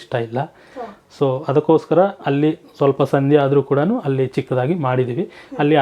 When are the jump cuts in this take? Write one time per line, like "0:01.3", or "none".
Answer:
none